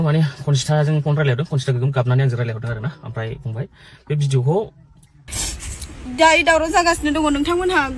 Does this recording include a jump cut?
yes; 1 cut; at 5.2 s

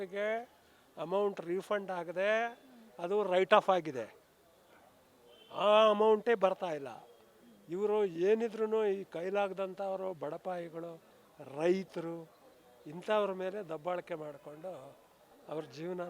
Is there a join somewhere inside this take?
no; 0 cuts

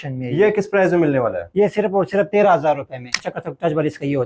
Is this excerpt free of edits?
no; 1 cut; at 3.2 s

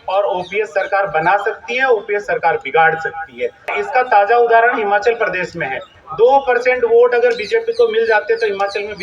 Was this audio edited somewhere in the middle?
yes; 1 cut; at 3.7 s

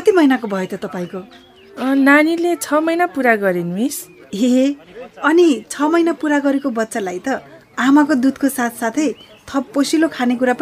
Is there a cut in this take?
no; 0 cuts

